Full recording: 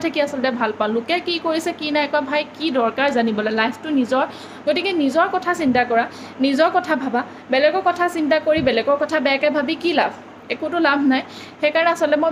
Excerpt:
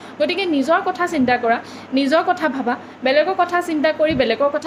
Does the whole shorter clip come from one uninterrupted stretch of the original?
yes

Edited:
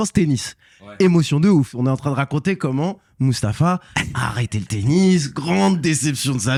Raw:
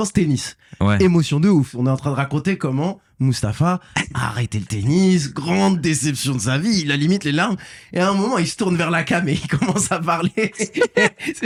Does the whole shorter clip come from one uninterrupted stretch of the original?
yes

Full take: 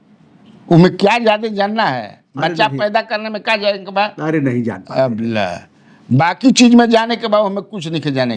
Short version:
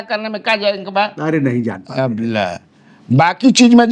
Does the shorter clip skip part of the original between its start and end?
no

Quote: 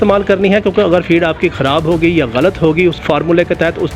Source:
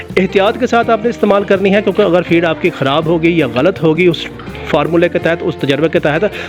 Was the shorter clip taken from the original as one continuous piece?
no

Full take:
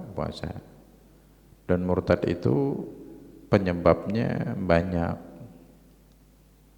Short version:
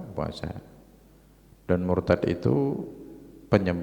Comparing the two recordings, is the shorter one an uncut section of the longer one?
yes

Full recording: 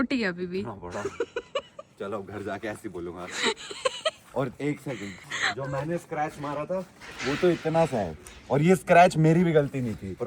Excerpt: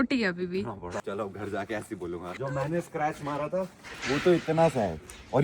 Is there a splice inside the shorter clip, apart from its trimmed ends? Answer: yes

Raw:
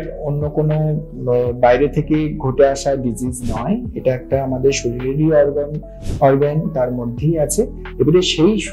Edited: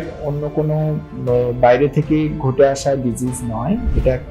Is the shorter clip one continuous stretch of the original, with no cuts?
yes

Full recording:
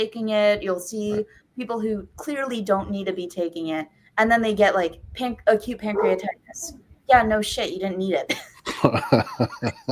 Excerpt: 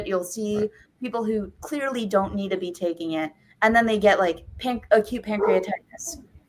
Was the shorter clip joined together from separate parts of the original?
no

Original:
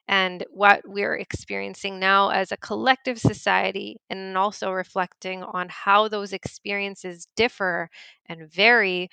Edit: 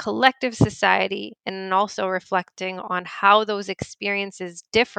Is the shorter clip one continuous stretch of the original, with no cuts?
yes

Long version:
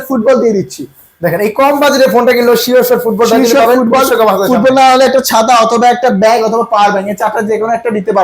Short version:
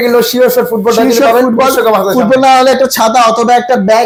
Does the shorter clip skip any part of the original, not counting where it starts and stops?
no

